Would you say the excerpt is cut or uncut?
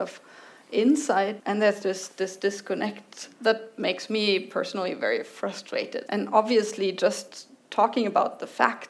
cut